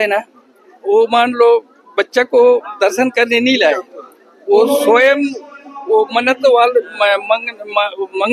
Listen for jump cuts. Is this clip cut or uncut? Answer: uncut